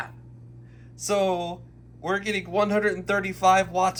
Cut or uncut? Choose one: uncut